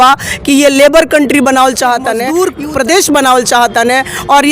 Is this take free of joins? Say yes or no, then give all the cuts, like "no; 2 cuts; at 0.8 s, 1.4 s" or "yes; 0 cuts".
no; 1 cut; at 2.3 s